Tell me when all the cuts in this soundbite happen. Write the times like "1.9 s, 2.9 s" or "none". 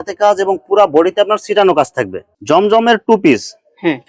2.3 s